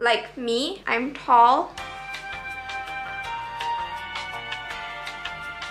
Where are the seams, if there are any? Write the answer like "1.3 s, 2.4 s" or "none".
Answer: none